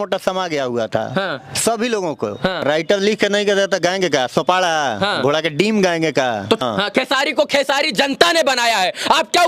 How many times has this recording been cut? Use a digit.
2